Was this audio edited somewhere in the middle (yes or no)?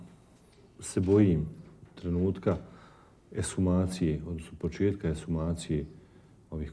no